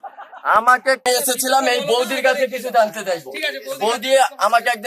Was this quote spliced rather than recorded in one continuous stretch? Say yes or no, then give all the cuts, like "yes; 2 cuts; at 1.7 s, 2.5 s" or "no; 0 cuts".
yes; 1 cut; at 1.0 s